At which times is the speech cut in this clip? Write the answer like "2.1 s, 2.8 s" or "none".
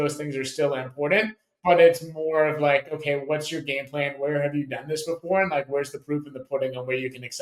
none